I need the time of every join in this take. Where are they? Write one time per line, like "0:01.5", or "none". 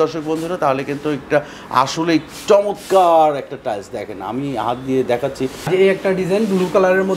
0:05.6